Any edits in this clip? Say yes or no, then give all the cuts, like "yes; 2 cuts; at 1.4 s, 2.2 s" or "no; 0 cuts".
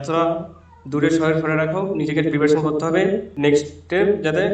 yes; 1 cut; at 3.3 s